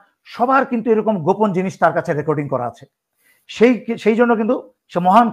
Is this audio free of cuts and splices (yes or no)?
yes